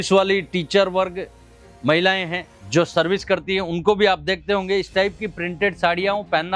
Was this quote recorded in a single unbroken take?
yes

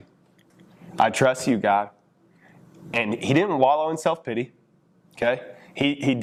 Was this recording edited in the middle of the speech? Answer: no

